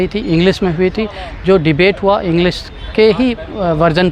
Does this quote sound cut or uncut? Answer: uncut